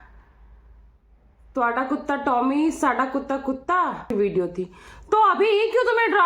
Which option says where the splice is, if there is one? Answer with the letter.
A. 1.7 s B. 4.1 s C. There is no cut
B